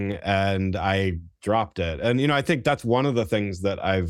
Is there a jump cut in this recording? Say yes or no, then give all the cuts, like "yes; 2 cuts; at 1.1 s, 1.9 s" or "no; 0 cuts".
no; 0 cuts